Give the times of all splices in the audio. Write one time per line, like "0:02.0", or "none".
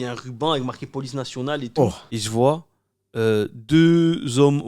0:02.1